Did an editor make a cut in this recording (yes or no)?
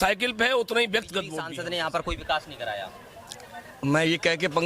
yes